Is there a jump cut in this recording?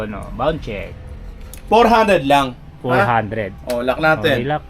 yes; 1 cut; at 1.6 s

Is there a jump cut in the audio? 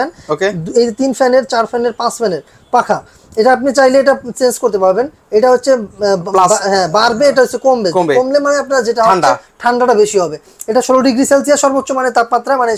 no; 0 cuts

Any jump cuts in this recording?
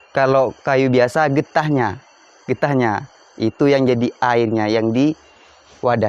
no; 0 cuts

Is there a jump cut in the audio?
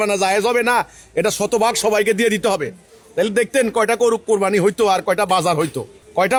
no; 0 cuts

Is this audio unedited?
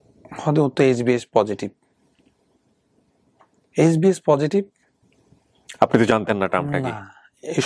yes; 0 cuts

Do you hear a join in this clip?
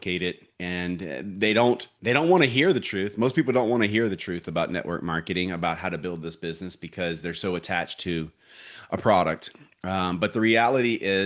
yes; 1 cut; at 1.9 s

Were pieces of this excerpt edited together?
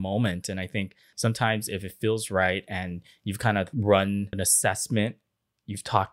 yes; 3 cuts; at 1.0 s, 3.7 s, 4.3 s

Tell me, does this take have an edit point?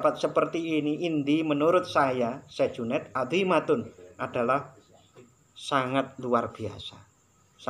no; 0 cuts

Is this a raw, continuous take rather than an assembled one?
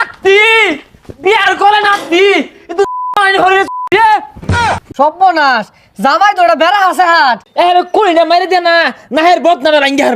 no; 2 cuts; at 4.6 s, 7.5 s

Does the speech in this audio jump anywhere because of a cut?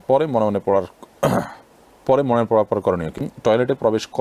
yes; 1 cut; at 3.2 s

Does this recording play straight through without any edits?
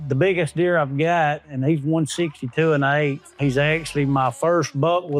yes; 0 cuts

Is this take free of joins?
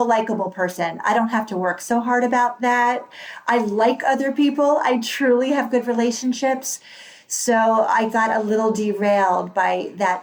yes; 0 cuts

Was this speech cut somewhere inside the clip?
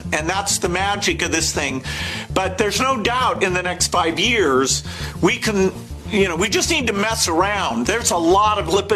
no; 0 cuts

